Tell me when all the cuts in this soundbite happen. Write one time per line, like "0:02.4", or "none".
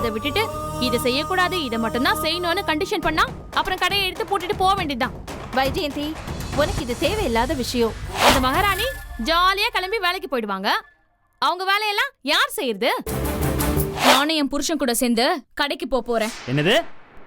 0:08.1
0:14.0